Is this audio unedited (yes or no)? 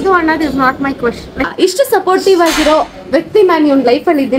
no